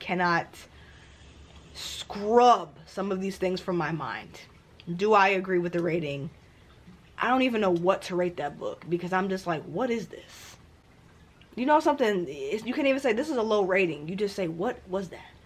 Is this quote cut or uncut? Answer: uncut